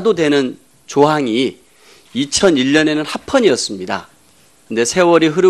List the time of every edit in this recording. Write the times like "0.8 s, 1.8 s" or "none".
3.5 s